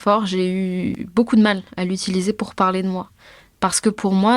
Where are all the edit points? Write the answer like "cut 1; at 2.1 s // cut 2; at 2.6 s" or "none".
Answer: cut 1; at 1.0 s